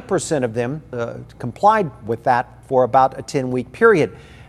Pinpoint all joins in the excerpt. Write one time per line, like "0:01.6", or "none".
0:01.0